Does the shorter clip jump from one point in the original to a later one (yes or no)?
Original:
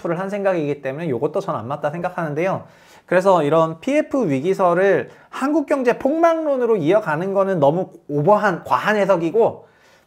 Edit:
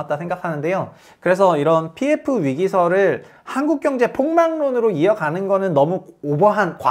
yes